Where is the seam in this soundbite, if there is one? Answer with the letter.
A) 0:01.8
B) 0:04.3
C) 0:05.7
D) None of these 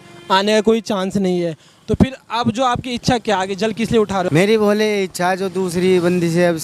B